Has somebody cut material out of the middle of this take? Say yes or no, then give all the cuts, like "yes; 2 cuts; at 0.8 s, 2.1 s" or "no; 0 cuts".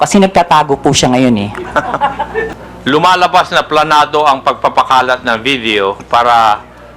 yes; 1 cut; at 2.6 s